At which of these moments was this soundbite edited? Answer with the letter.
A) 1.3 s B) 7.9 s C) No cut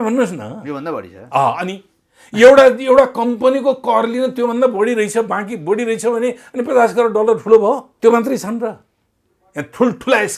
B